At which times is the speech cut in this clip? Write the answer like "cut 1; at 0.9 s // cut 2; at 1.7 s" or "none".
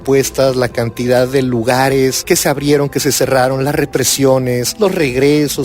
cut 1; at 2.2 s // cut 2; at 4.7 s